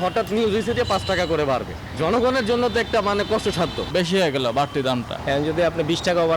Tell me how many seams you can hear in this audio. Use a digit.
2